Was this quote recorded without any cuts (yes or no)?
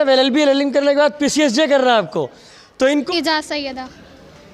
no